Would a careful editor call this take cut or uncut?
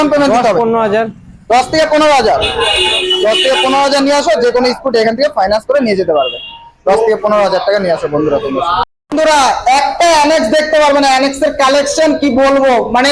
uncut